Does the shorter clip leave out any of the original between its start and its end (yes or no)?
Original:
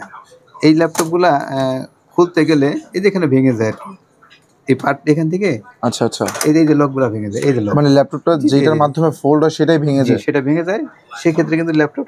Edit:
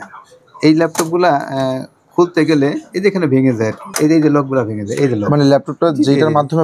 yes